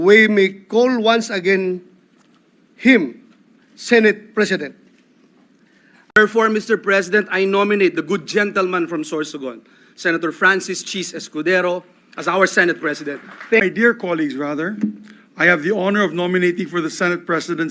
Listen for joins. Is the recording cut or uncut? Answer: cut